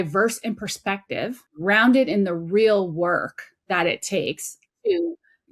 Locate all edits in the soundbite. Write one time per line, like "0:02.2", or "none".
0:01.5

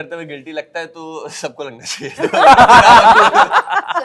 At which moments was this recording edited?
none

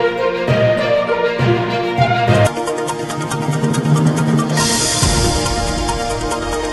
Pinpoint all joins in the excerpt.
none

